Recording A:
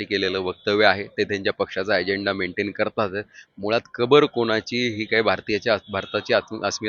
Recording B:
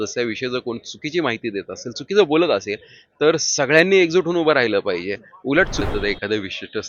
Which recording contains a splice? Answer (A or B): B